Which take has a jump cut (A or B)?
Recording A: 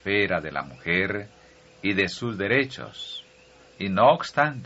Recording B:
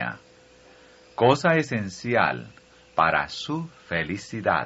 B